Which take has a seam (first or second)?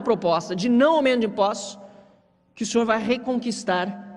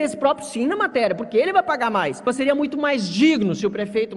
second